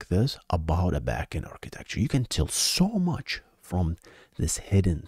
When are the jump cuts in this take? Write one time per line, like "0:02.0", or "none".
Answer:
none